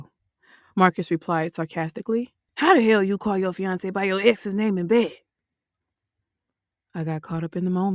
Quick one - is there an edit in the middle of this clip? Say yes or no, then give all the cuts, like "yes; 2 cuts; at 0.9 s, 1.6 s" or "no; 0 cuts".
yes; 1 cut; at 2.4 s